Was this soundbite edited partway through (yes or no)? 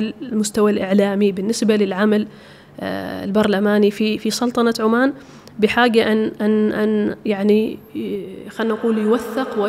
no